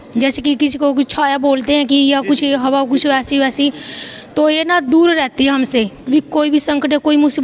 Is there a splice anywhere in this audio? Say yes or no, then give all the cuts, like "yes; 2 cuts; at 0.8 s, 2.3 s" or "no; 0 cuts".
no; 0 cuts